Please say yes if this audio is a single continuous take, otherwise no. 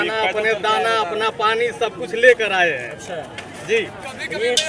yes